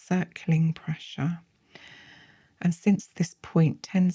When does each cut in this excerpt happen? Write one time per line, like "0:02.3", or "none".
none